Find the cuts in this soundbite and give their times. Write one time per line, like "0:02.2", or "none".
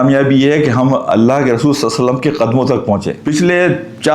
0:03.2

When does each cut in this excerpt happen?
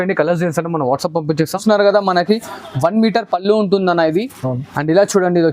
0:01.6

